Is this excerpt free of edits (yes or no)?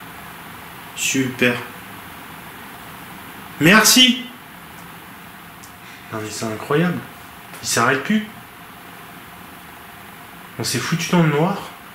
no